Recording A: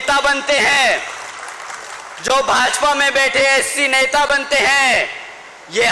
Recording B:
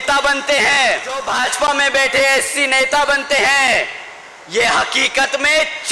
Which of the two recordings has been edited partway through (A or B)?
B